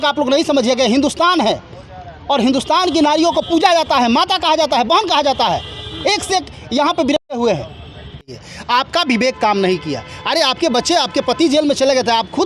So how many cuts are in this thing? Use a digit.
0